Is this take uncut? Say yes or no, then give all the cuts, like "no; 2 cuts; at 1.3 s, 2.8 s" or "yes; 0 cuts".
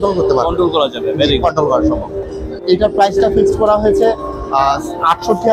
yes; 0 cuts